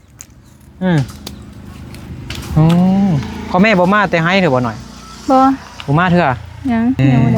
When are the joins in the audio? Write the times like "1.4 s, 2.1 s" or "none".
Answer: none